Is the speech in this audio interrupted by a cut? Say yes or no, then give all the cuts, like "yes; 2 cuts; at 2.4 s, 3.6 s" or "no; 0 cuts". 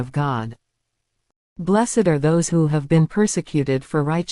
yes; 1 cut; at 1.5 s